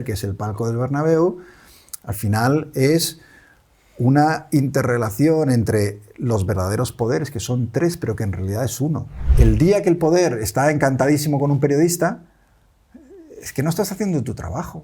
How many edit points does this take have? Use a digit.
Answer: 1